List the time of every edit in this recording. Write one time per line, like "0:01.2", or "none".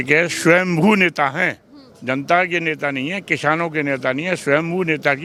none